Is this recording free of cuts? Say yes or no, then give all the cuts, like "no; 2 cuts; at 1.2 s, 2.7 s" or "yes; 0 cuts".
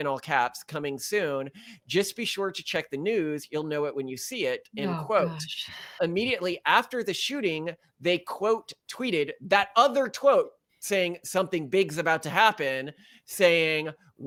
yes; 0 cuts